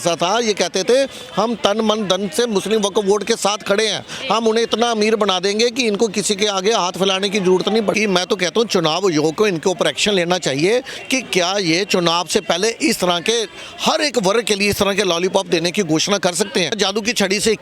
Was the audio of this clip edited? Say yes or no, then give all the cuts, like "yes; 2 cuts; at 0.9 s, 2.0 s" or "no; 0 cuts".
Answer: yes; 2 cuts; at 7.9 s, 16.8 s